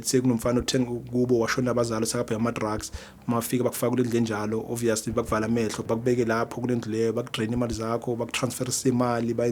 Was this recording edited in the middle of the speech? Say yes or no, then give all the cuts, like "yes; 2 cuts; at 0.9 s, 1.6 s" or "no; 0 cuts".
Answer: yes; 1 cut; at 5.9 s